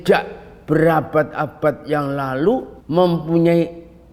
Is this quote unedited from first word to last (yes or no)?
no